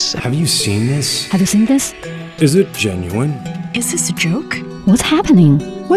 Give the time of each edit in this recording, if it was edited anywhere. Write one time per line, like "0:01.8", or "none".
none